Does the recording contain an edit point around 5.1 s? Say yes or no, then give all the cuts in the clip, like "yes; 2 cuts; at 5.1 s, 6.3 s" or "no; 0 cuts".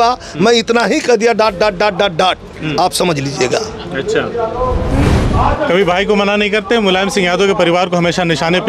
yes; 1 cut; at 5.1 s